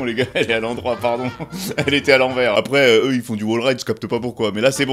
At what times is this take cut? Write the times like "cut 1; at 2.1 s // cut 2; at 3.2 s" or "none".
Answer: none